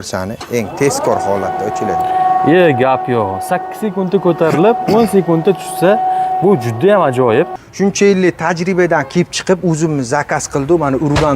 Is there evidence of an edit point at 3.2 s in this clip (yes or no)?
no